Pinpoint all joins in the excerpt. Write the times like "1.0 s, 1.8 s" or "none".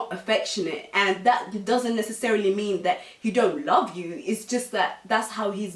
none